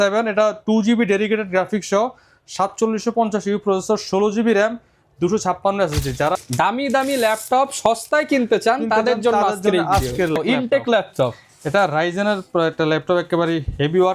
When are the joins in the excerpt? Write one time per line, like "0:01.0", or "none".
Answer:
0:06.3
0:10.4